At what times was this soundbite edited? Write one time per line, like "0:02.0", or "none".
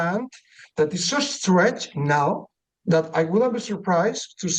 none

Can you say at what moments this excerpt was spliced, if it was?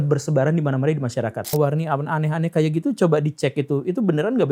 0:01.5

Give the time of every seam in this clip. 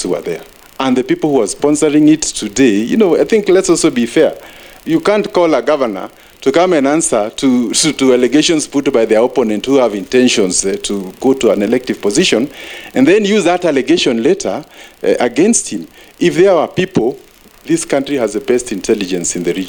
none

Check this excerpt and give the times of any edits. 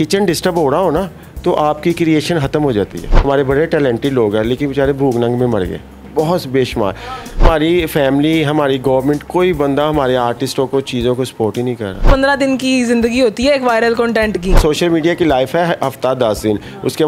0:03.1
0:07.4
0:12.0
0:14.6

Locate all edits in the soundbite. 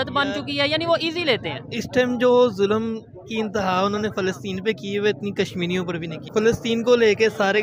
0:06.2

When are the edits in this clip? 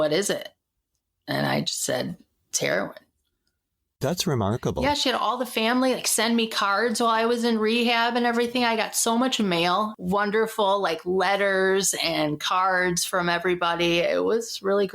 0:04.0
0:10.0

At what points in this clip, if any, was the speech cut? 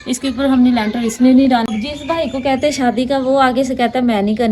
0:01.7

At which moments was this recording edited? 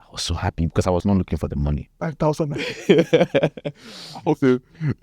0:01.0
0:02.1

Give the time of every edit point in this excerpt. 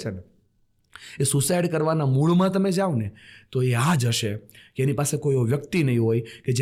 none

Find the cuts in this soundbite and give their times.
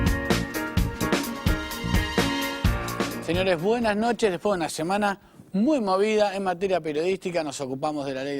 0:03.1

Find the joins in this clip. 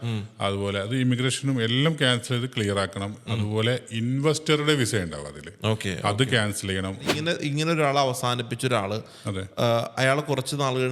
0:07.1

